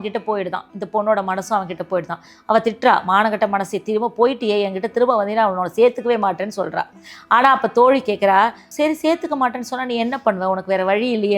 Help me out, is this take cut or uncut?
cut